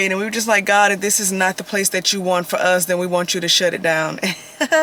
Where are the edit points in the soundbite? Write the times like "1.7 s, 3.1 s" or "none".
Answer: none